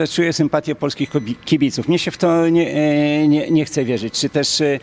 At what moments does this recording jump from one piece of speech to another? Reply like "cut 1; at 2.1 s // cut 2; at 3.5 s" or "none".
none